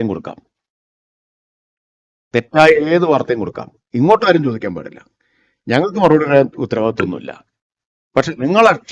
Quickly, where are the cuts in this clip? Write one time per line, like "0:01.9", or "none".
none